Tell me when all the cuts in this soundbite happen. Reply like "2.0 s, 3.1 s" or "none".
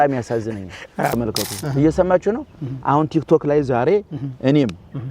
1.1 s